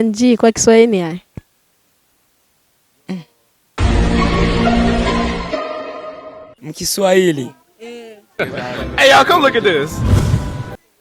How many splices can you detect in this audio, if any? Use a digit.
0